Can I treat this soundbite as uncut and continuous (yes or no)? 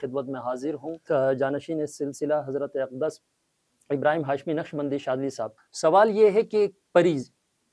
no